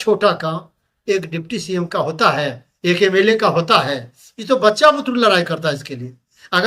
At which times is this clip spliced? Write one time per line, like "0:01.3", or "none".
none